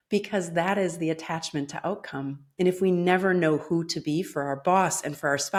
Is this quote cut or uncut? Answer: uncut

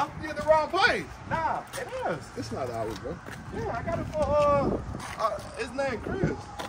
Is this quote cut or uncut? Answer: uncut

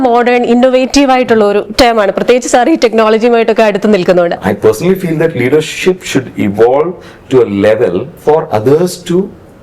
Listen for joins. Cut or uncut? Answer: cut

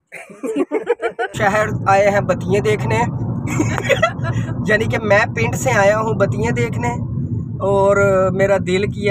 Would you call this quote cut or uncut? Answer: cut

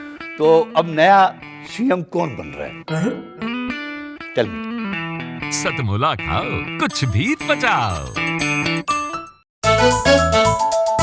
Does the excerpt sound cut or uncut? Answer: cut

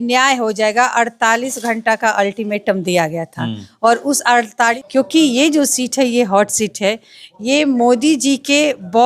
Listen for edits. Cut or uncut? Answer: cut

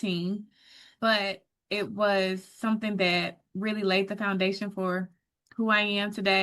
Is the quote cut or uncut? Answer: cut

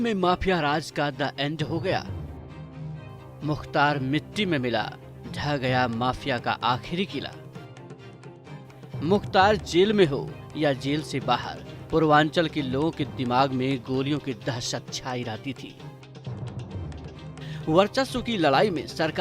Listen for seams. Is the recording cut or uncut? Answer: cut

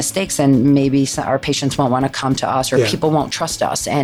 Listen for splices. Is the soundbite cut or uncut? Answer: cut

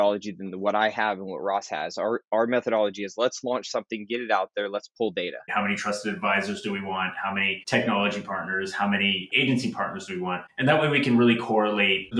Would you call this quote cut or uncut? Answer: cut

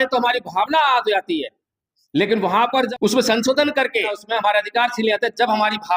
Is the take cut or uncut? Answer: cut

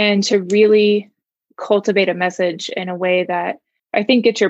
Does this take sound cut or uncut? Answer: uncut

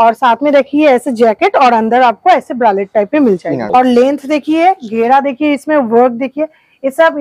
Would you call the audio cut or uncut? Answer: cut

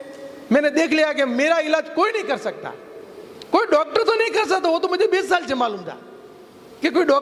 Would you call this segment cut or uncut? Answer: uncut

